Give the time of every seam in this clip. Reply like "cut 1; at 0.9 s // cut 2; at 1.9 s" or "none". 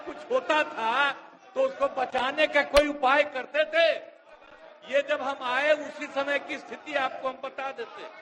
none